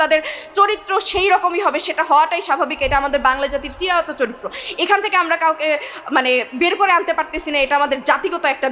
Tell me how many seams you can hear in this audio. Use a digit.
0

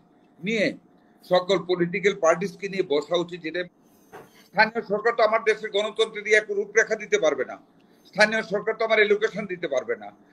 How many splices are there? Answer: 1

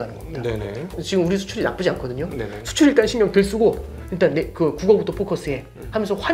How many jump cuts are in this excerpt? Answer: 1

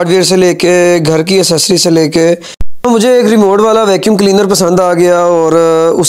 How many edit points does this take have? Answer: 1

